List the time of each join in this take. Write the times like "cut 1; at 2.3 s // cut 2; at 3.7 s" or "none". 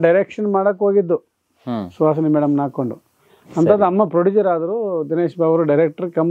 none